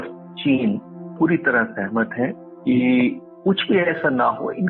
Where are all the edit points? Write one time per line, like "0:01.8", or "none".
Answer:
0:01.1
0:02.5
0:03.3